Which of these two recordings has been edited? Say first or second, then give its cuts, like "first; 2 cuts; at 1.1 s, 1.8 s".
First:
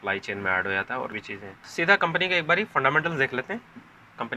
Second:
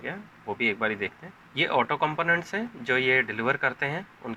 first; 1 cut; at 1.2 s